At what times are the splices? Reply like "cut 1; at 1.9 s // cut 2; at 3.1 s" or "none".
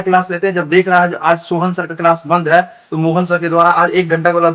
none